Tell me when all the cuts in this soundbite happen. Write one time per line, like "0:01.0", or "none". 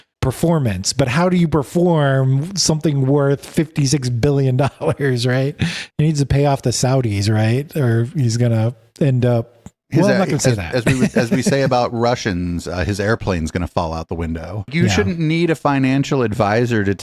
0:05.8
0:14.7